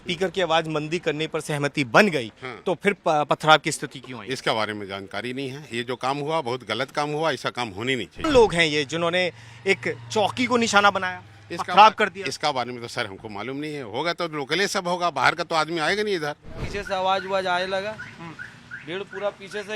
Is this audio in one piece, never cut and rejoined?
no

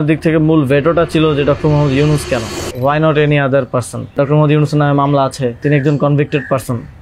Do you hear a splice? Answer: yes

